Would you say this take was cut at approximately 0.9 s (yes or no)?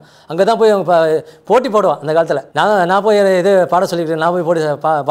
no